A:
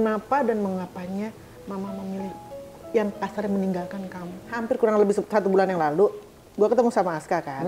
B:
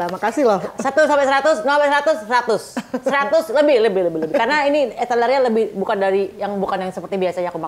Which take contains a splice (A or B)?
A